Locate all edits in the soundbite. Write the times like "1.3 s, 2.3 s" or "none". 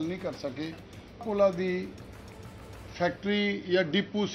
1.2 s